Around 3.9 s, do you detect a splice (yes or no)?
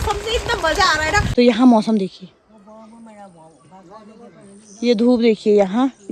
no